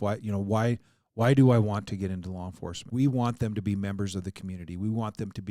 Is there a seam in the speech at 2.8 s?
yes; 1 cut; at 2.8 s

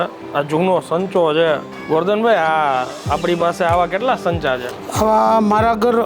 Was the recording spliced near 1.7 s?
yes; 1 cut; at 1.7 s

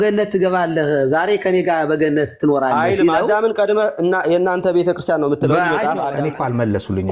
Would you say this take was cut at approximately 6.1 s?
yes; 1 cut; at 6.1 s

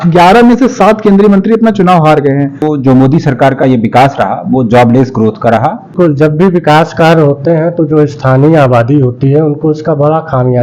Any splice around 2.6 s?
yes; 2 cuts; at 2.6 s, 5.9 s

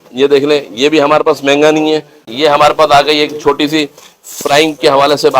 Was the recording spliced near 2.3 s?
yes; 1 cut; at 2.3 s

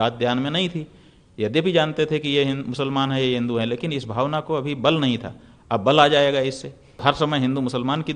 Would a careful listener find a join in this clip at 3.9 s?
no; 1 cut; at 7.0 s

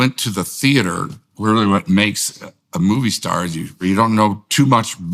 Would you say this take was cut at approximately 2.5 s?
no; 1 cut; at 3.7 s

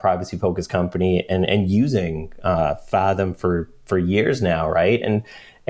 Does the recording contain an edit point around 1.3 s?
no; 0 cuts

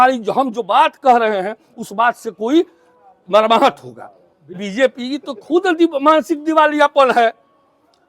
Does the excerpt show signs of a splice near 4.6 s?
yes; 1 cut; at 4.6 s

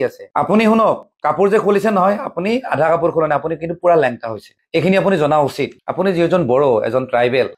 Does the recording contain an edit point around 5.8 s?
yes; 1 cut; at 5.8 s

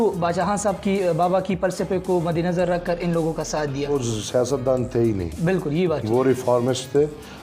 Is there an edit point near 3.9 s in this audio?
yes; 1 cut; at 3.9 s

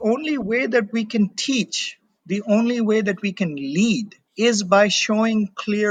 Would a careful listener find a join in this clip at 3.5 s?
no; 0 cuts

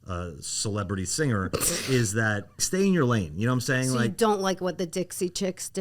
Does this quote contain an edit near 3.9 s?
no; 1 cut; at 2.6 s

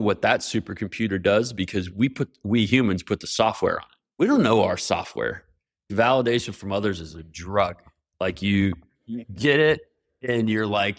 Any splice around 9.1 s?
no; 1 cut; at 5.8 s

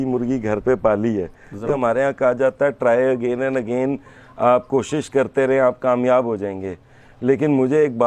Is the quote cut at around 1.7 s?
yes; 1 cut; at 1.7 s

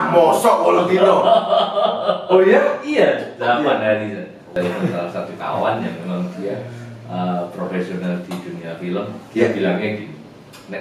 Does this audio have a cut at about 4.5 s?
yes; 1 cut; at 4.5 s

